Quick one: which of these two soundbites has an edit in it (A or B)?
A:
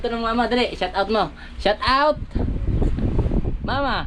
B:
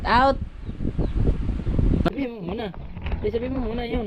B